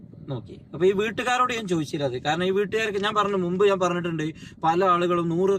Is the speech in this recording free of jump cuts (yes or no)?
yes